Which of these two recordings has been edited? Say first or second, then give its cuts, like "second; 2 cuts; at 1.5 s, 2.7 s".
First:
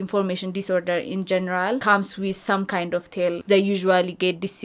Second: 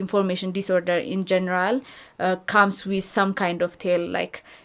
first; 2 cuts; at 1.8 s, 3.4 s